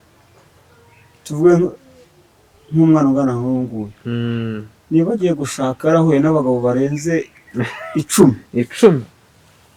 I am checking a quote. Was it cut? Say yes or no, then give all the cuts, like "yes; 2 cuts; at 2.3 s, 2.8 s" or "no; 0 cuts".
no; 0 cuts